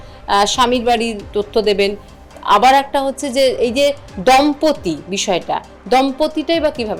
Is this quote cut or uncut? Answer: uncut